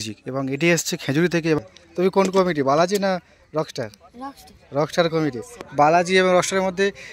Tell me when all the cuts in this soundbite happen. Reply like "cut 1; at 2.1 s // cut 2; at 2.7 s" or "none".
cut 1; at 1.6 s // cut 2; at 5.5 s